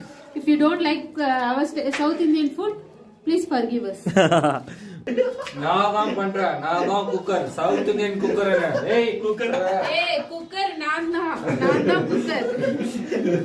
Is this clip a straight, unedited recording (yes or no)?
no